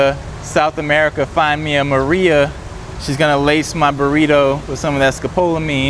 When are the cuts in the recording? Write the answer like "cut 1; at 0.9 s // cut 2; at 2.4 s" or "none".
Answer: none